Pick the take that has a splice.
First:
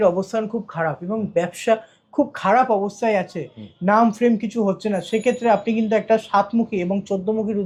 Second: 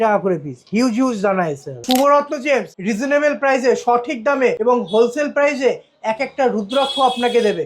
second; 3 cuts; at 1.8 s, 2.7 s, 4.6 s

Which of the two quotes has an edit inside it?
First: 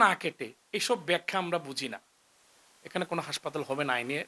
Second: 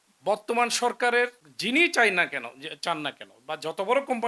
second; 1 cut; at 1.5 s

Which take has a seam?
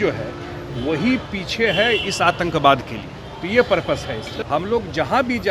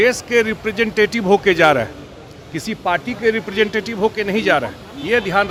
first; 1 cut; at 4.3 s

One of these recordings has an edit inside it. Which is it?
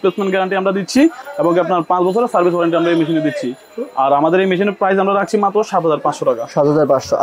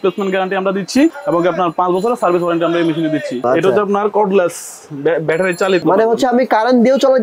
second; 3 cuts; at 1.2 s, 3.5 s, 5.8 s

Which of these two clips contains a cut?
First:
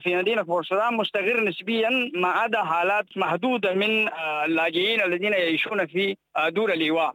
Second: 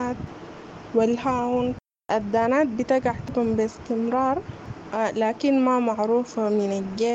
first; 2 cuts; at 3.1 s, 6.2 s

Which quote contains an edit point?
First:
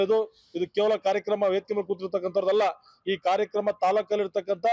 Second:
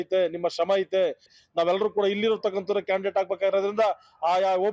second; 1 cut; at 1.3 s

